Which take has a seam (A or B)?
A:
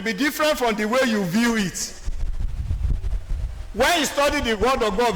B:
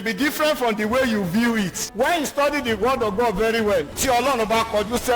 B